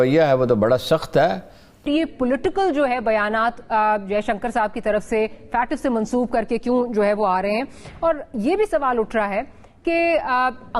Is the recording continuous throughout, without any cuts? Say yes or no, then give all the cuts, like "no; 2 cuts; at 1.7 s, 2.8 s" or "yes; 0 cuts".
no; 1 cut; at 1.9 s